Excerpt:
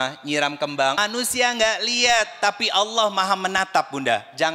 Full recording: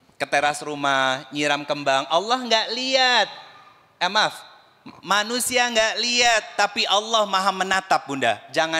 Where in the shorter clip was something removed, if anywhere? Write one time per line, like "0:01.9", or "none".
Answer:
0:01.0